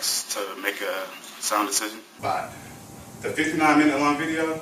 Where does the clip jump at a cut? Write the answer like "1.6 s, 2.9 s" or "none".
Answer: 2.1 s